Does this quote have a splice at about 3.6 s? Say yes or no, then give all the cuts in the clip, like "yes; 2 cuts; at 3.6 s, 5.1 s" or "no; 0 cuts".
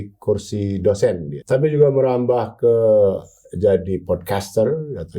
no; 1 cut; at 1.3 s